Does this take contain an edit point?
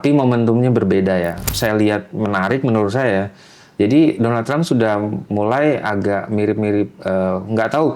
yes; 1 cut; at 1.5 s

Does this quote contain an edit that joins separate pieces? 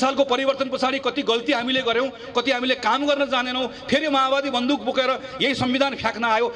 no; 0 cuts

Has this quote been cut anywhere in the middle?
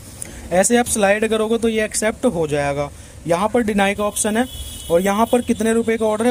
no; 0 cuts

